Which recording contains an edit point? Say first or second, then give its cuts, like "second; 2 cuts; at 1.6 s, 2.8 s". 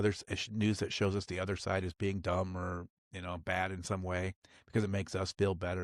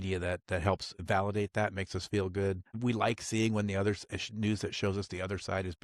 second; 2 cuts; at 0.9 s, 2.7 s